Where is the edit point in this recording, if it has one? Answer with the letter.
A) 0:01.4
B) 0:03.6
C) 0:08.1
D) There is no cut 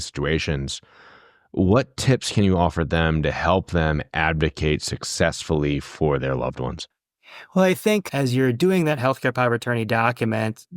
C